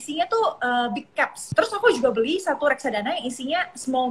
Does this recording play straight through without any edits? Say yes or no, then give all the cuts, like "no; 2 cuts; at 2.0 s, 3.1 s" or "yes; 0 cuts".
no; 1 cut; at 1.4 s